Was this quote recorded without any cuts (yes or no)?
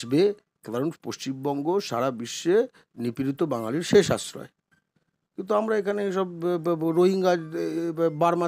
yes